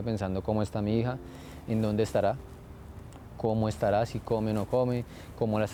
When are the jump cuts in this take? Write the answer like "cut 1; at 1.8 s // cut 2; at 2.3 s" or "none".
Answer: none

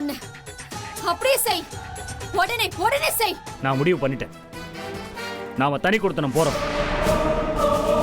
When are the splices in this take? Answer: cut 1; at 3.5 s

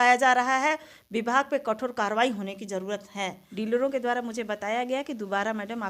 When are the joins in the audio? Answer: cut 1; at 3.4 s

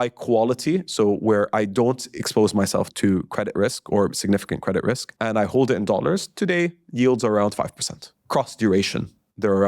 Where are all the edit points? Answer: cut 1; at 2.9 s // cut 2; at 5.1 s // cut 3; at 8.2 s

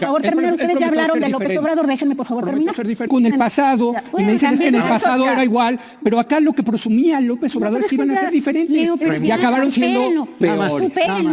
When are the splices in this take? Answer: cut 1; at 3.1 s

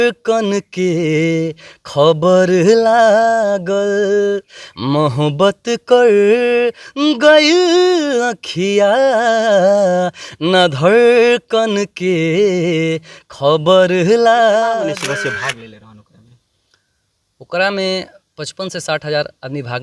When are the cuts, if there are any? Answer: cut 1; at 15.0 s

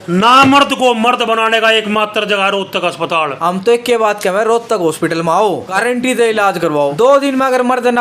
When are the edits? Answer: cut 1; at 3.4 s // cut 2; at 5.7 s // cut 3; at 6.9 s

